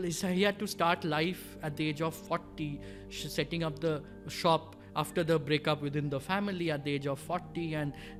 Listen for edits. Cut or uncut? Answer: uncut